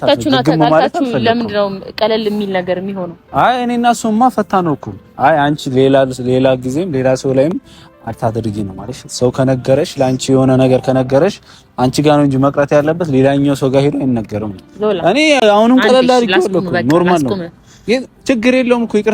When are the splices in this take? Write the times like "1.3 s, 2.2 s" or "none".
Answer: none

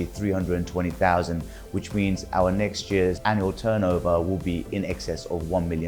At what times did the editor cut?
3.2 s

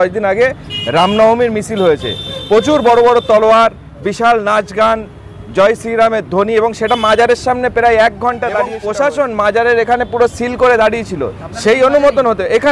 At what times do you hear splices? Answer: 8.8 s

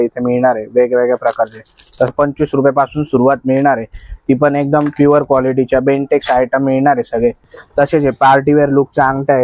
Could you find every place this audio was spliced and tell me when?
2.1 s, 7.5 s

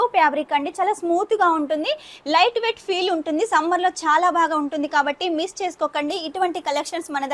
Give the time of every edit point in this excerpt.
none

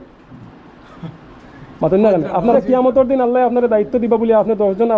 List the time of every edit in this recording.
2.5 s

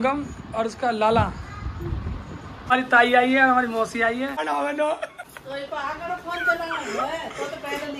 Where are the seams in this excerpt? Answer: 2.6 s, 4.4 s, 5.3 s

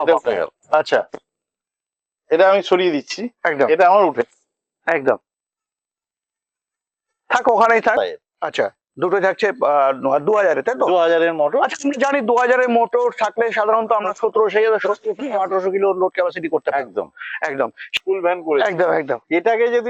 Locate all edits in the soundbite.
8.0 s, 18.0 s

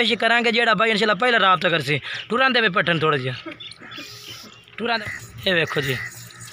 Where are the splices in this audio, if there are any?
5.0 s

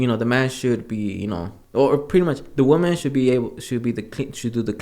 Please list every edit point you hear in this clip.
1.5 s

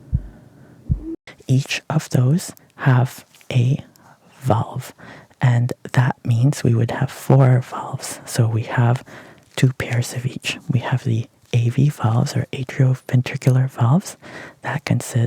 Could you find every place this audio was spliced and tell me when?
0.9 s

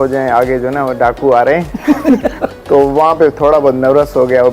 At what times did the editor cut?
2.4 s

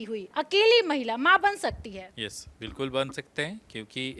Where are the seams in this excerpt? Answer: none

